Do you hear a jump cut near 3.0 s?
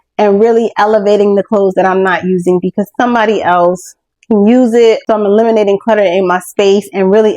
no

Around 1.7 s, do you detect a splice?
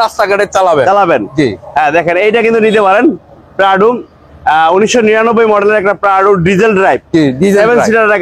no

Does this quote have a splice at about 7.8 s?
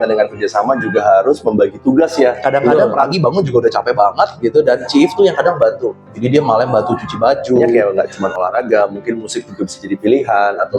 yes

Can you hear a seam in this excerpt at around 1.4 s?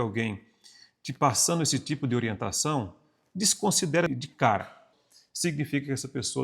no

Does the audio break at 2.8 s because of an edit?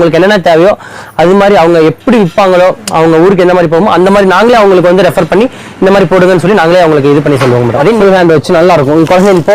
no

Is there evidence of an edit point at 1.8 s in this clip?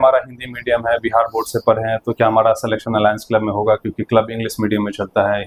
no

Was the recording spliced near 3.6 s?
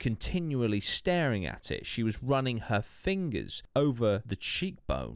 yes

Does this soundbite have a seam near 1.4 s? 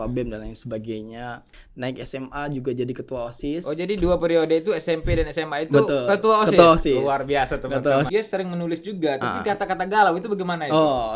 yes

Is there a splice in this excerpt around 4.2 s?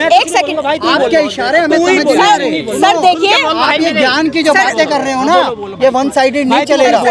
no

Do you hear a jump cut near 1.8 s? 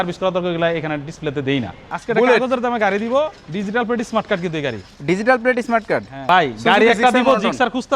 yes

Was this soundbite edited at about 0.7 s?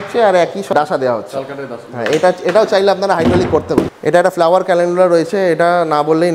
yes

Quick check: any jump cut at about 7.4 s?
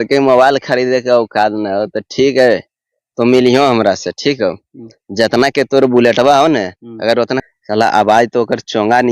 yes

